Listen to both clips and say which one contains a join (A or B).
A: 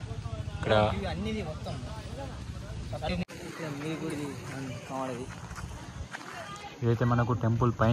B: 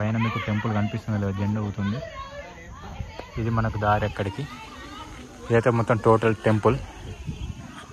A